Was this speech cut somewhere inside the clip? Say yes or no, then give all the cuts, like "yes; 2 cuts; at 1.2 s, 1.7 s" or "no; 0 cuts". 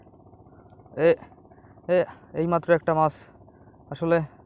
no; 0 cuts